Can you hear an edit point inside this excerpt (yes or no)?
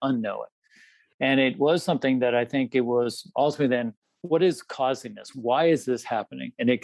yes